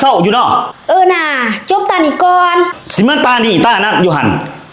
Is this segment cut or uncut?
uncut